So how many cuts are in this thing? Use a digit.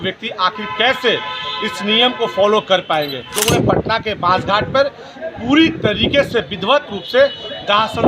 1